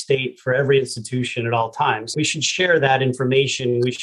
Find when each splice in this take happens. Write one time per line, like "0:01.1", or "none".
0:02.1